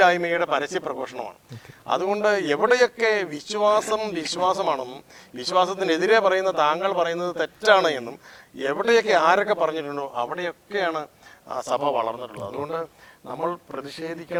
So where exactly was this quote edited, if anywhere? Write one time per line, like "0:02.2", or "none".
none